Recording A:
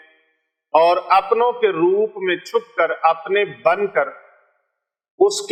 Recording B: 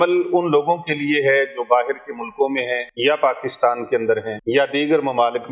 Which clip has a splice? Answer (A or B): B